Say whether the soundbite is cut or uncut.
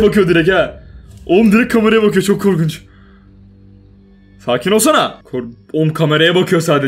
cut